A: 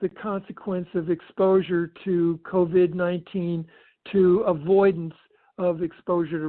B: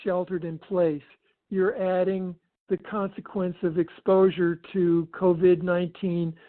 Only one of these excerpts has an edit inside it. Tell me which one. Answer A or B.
B